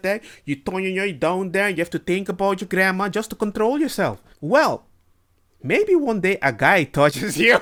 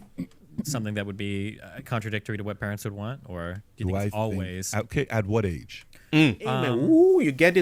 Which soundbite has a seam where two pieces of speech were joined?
second; 1 cut; at 6.6 s

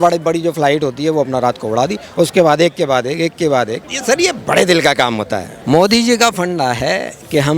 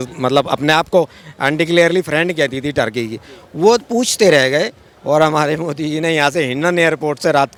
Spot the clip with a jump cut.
first; 1 cut; at 3.9 s

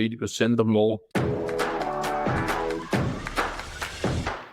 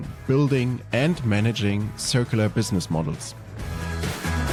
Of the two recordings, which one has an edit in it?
first; 1 cut; at 1.0 s

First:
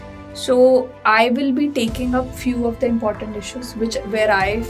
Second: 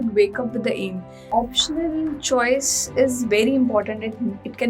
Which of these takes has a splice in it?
second; 1 cut; at 1.3 s

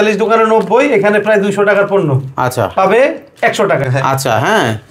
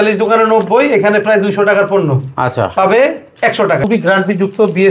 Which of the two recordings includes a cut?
second; 1 cut; at 3.8 s

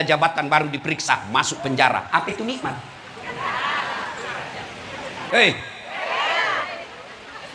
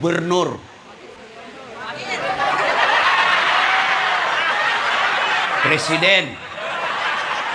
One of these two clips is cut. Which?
first; 1 cut; at 5.2 s

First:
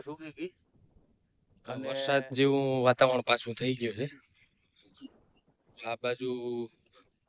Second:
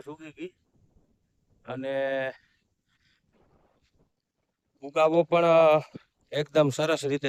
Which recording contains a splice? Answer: first; 1 cut; at 1.9 s

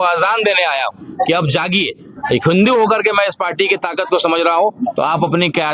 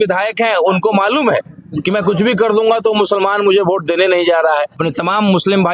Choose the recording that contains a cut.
second; 1 cut; at 4.8 s

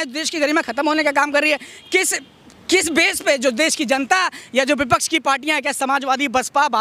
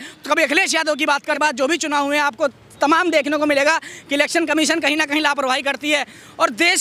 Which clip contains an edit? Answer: second; 1 cut; at 1.4 s

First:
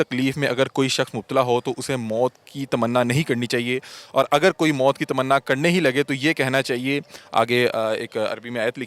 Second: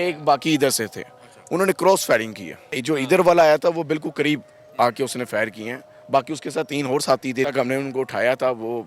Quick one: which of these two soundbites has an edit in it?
second; 2 cuts; at 2.8 s, 7.5 s

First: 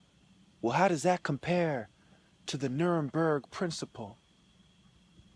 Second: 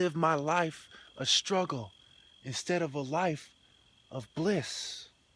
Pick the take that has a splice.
second; 1 cut; at 3.0 s

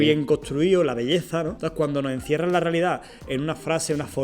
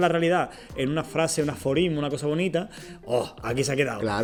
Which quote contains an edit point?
first; 1 cut; at 1.6 s

